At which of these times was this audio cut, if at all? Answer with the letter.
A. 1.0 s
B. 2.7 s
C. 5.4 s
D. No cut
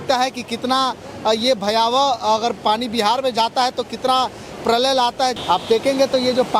C